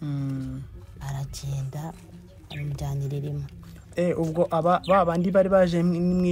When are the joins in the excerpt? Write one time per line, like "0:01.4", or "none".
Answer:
none